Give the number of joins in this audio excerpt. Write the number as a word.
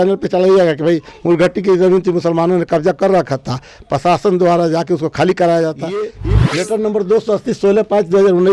one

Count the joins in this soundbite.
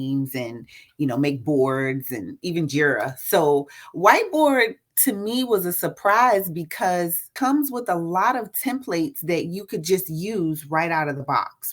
one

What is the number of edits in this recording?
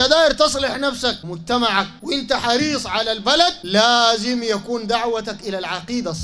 three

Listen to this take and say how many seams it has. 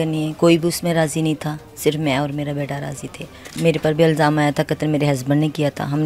one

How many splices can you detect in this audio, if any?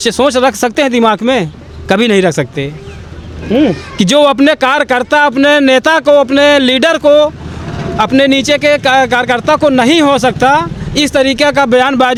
zero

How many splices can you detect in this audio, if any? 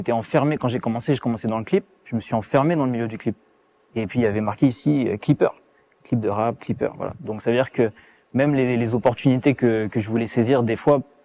zero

